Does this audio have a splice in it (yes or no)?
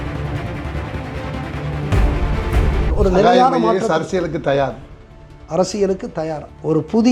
yes